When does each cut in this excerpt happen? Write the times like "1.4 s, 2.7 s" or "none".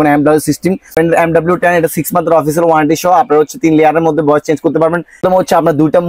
0.9 s, 5.2 s